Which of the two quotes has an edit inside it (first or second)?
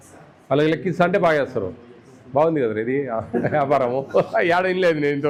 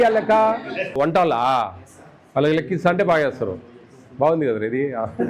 second